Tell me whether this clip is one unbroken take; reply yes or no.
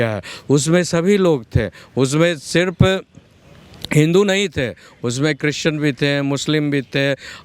yes